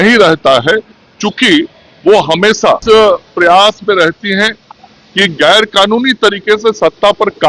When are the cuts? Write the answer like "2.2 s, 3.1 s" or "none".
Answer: 2.8 s